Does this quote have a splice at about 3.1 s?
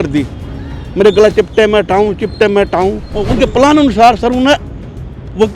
yes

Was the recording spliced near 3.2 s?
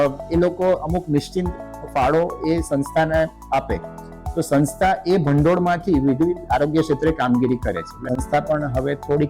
no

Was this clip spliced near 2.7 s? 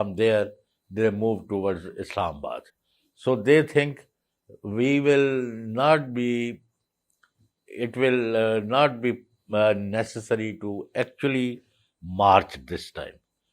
no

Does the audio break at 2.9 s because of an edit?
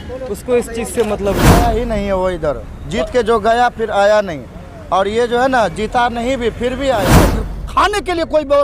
no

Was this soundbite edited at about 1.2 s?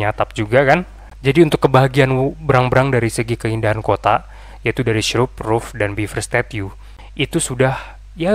yes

